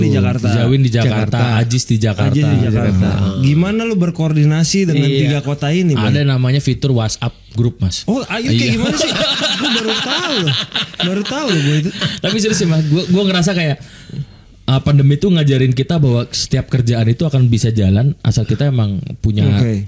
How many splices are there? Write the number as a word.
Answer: one